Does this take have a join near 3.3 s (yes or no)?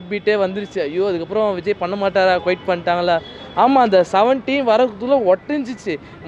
no